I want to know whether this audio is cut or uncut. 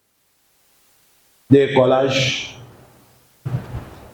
uncut